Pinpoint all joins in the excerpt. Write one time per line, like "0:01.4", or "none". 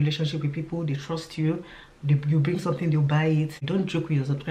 0:03.6